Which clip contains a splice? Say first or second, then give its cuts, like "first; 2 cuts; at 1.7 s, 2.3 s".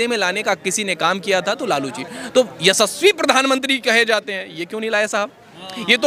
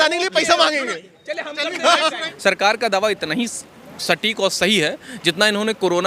second; 1 cut; at 2.3 s